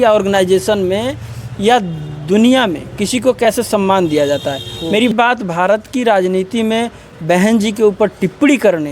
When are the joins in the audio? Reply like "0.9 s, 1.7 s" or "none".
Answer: 5.1 s